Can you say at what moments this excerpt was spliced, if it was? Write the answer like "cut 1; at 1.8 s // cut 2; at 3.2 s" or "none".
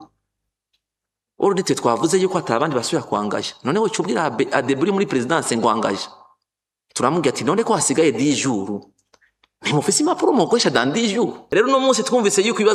cut 1; at 11.4 s